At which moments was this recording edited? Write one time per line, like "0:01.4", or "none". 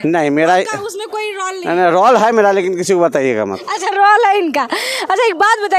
none